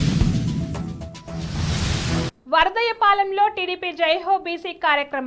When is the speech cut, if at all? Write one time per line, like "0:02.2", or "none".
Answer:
0:02.3